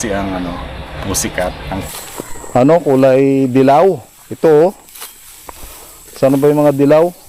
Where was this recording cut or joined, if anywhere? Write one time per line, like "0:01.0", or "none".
0:01.7